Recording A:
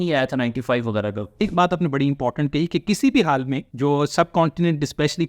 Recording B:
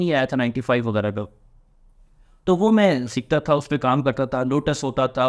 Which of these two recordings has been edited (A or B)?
A